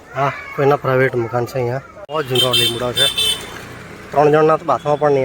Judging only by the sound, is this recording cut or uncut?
cut